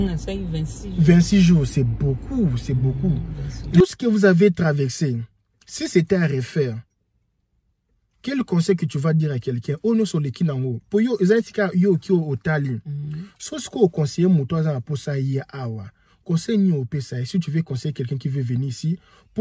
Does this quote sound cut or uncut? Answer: cut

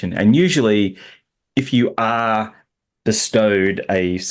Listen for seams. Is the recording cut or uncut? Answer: uncut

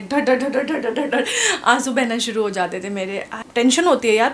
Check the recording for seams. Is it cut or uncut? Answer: cut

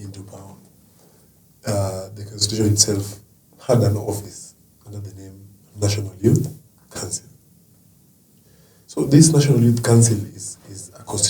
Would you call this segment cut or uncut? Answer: uncut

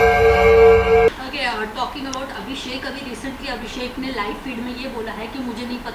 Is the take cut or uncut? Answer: cut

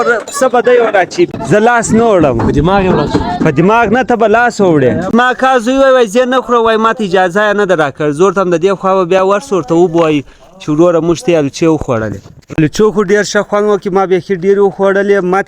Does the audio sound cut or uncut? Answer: cut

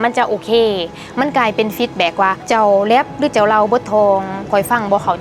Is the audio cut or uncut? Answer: cut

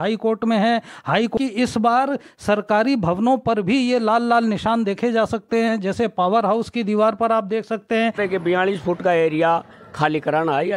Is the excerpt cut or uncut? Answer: cut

